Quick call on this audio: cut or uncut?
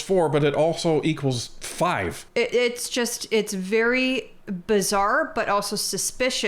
cut